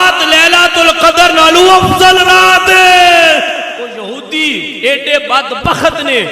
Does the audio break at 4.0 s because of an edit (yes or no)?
yes